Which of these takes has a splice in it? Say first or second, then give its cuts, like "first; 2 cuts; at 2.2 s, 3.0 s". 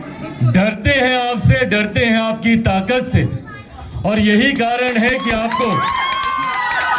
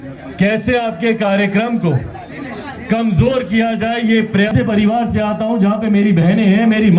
second; 1 cut; at 4.5 s